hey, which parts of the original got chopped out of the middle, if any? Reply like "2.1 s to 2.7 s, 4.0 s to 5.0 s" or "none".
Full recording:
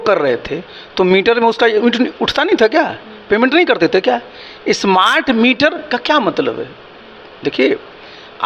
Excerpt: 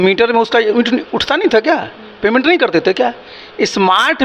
none